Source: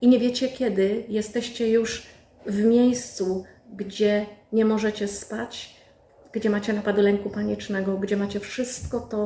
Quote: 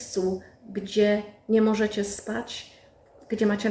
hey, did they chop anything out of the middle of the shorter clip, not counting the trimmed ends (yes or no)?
no